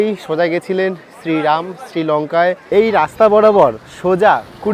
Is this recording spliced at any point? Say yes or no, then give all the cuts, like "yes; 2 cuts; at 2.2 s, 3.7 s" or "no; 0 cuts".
yes; 1 cut; at 2.6 s